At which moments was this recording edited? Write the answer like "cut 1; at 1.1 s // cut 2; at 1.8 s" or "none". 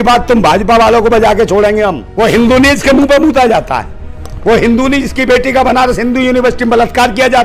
cut 1; at 2.0 s